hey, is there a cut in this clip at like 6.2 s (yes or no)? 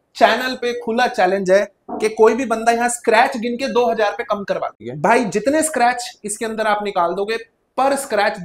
no